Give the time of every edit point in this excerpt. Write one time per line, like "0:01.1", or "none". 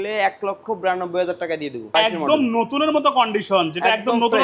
0:01.9